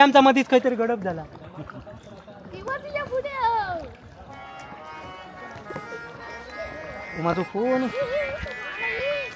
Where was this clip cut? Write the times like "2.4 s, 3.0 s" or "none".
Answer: none